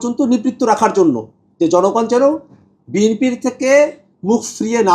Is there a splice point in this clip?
no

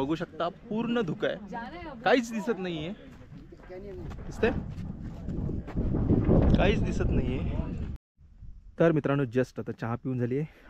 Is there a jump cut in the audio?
yes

